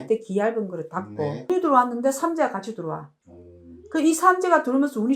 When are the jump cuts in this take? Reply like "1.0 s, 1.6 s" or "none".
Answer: 1.5 s